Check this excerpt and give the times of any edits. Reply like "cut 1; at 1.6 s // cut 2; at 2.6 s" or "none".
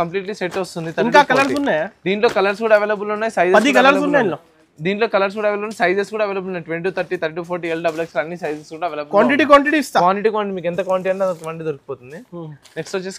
none